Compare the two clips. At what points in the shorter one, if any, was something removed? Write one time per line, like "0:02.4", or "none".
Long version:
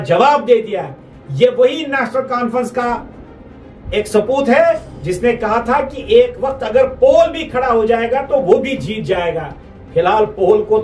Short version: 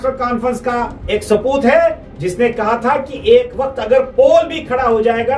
0:01.0